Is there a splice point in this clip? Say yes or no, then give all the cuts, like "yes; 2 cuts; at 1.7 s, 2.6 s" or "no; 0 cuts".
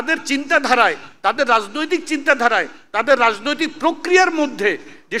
no; 0 cuts